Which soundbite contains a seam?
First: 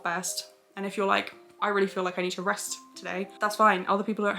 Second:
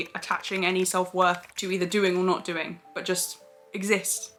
first; 1 cut; at 3.3 s

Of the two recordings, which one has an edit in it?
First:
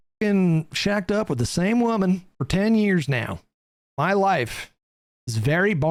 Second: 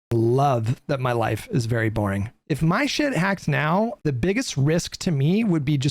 second; 2 cuts; at 2.3 s, 4.0 s

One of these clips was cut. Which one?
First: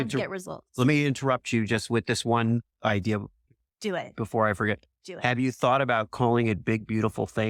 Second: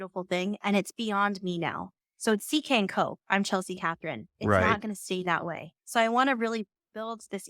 second; 1 cut; at 5.7 s

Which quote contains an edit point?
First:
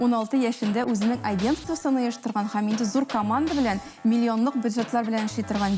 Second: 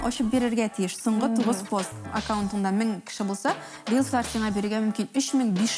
second; 1 cut; at 2.1 s

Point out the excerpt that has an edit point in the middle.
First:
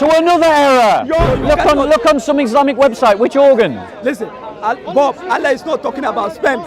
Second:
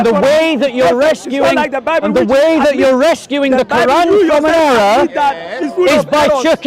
first; 1 cut; at 1.3 s

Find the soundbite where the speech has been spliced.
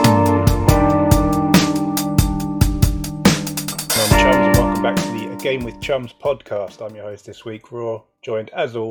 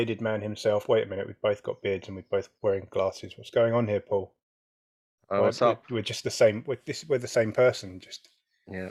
first; 1 cut; at 1.3 s

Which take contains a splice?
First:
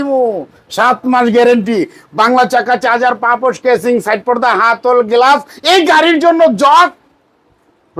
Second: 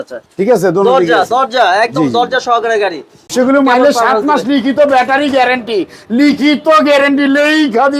second; 1 cut; at 3.3 s

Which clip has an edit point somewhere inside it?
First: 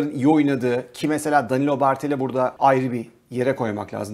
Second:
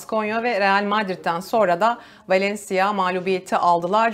first; 1 cut; at 2.5 s

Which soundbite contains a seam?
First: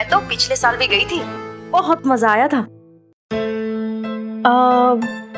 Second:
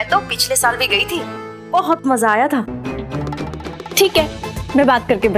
second; 1 cut; at 2.8 s

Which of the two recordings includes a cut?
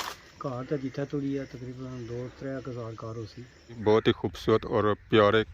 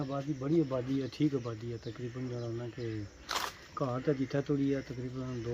first; 1 cut; at 3.7 s

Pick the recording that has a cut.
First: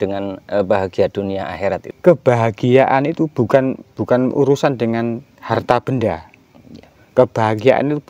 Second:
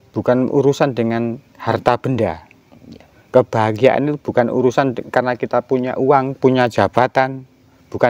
first; 1 cut; at 1.9 s

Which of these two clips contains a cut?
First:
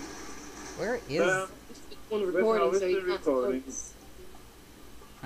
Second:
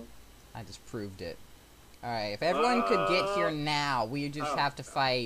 second; 1 cut; at 4.1 s

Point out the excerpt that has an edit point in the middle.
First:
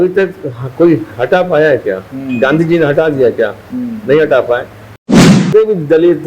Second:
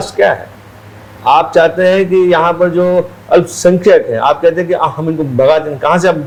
first; 1 cut; at 5.0 s

